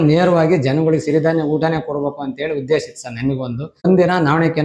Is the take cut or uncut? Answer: cut